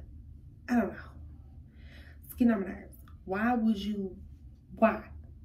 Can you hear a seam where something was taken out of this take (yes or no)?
no